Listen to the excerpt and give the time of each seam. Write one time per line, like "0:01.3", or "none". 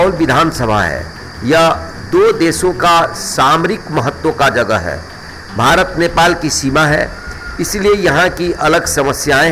none